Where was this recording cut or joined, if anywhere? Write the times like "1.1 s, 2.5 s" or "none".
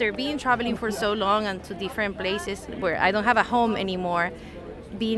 2.7 s